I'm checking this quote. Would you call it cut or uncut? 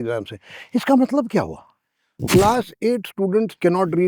cut